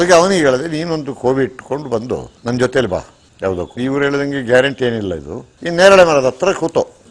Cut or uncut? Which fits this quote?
cut